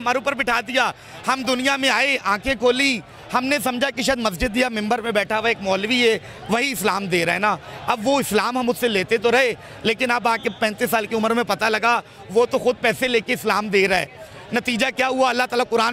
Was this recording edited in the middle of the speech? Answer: no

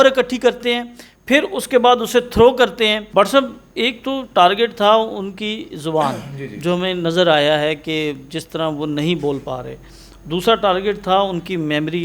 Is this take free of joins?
no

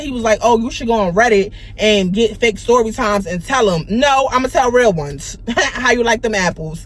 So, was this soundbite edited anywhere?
no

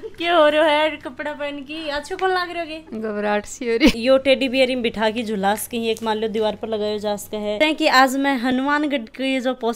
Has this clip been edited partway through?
yes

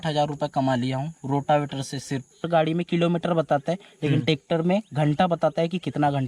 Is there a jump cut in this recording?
yes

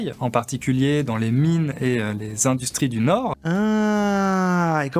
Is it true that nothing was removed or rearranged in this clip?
yes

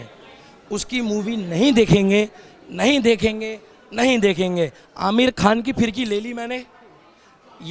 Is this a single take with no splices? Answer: yes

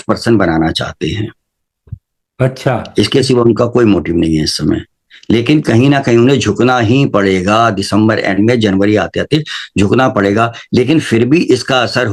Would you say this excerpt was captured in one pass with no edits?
yes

